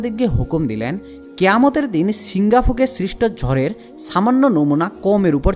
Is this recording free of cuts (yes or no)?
yes